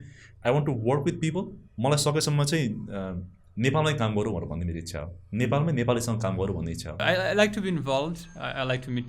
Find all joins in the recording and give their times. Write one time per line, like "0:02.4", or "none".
0:06.9